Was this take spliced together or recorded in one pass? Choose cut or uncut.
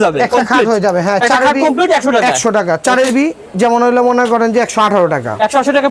uncut